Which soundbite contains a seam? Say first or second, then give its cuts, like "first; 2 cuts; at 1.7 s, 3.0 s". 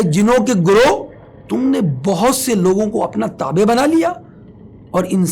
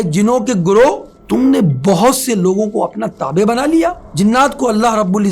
second; 2 cuts; at 1.1 s, 4.0 s